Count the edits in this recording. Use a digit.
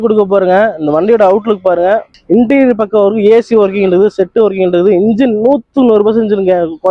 1